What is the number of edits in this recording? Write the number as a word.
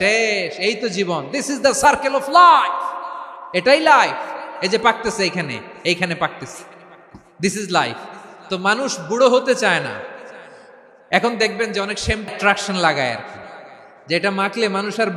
one